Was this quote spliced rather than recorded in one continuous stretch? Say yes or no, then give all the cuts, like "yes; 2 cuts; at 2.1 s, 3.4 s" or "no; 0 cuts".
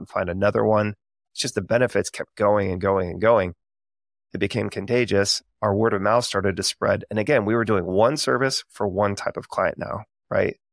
yes; 1 cut; at 4.3 s